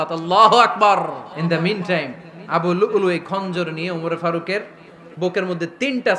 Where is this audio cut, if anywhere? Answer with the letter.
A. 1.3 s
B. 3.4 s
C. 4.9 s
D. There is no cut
A